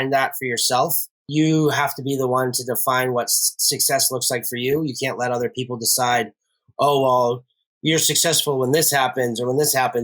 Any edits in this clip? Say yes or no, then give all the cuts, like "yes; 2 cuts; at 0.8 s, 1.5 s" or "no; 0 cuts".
yes; 1 cut; at 1.1 s